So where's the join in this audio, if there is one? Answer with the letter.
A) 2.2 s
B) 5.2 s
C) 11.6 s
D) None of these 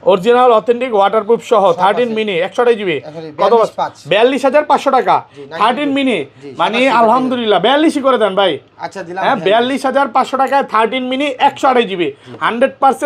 D